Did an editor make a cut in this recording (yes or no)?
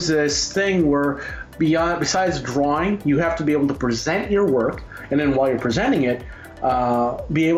no